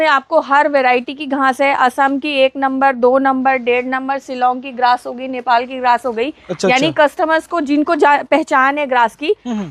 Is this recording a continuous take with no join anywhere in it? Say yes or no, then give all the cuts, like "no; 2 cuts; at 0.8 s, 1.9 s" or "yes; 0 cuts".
yes; 0 cuts